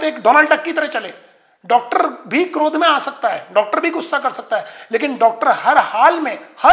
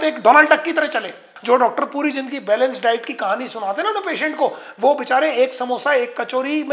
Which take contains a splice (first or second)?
second